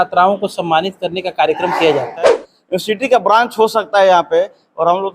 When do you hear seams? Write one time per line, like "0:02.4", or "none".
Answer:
0:02.5